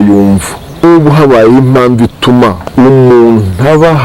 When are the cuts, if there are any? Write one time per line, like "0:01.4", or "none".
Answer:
0:00.8
0:02.6